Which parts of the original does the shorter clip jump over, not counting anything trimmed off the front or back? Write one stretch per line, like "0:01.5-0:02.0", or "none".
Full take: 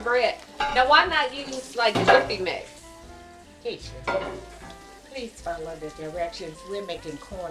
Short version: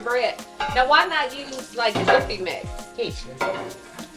0:02.8-0:03.4